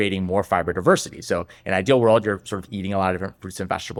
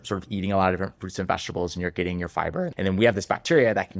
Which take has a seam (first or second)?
second